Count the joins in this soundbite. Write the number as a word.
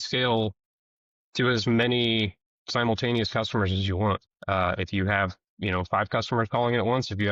one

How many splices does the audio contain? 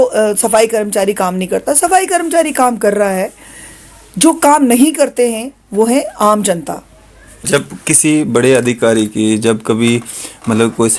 one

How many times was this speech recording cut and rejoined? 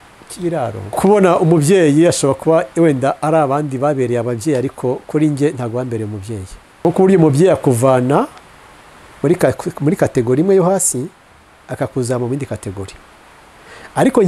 two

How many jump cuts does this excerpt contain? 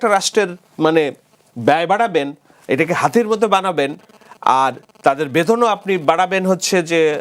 zero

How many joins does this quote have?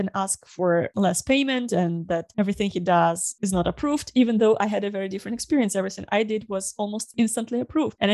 zero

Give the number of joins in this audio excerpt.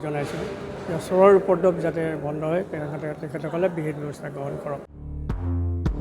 one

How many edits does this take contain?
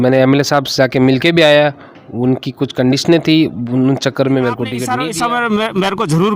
one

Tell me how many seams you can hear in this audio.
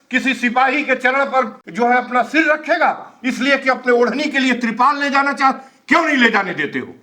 one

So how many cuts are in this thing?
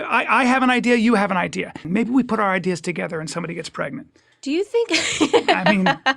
one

